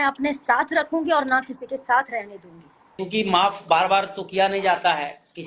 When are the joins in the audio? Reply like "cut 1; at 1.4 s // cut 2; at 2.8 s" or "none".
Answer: cut 1; at 3.0 s